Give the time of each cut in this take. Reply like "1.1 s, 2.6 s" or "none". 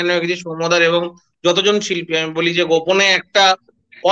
none